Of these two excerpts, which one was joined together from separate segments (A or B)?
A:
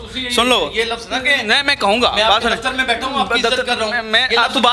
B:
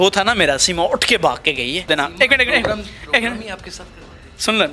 B